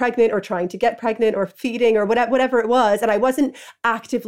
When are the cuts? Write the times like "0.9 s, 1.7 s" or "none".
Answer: none